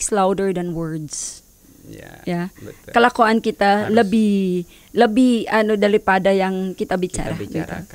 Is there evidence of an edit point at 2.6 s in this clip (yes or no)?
no